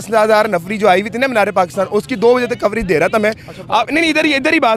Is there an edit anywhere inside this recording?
no; 0 cuts

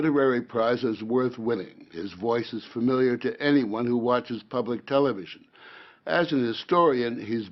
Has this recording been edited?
no; 0 cuts

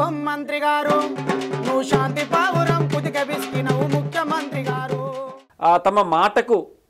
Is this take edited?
yes; 1 cut; at 5.4 s

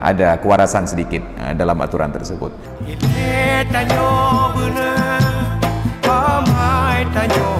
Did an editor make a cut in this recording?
yes; 1 cut; at 2.6 s

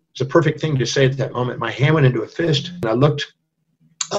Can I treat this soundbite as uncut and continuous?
no; 1 cut; at 2.8 s

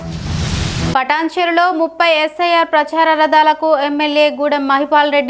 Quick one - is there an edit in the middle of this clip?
no; 0 cuts

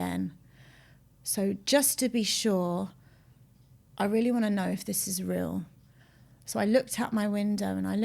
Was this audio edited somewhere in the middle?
no; 0 cuts

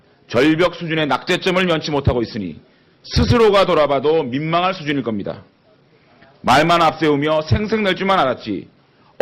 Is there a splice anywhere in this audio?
yes; 1 cut; at 5.5 s

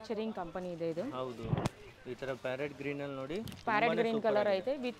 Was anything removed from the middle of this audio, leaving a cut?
no; 0 cuts

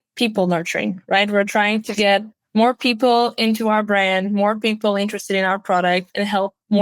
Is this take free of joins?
yes; 0 cuts

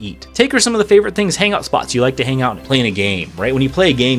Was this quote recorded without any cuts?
no; 1 cut; at 2.6 s

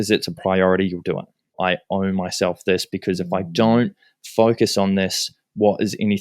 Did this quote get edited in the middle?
yes; 1 cut; at 1.6 s

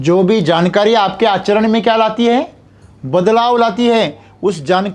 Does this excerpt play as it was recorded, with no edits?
yes; 0 cuts

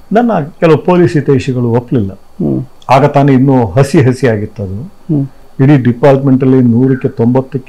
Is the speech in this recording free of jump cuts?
yes; 0 cuts

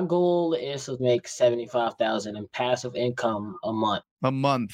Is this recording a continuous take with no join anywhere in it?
no; 1 cut; at 0.9 s

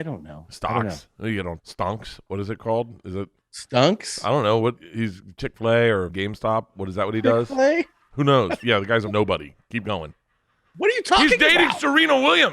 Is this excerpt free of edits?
no; 4 cuts; at 1.6 s, 4.8 s, 6.1 s, 9.0 s

